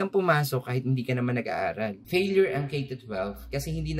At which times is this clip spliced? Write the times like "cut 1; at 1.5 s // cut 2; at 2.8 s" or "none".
cut 1; at 2.0 s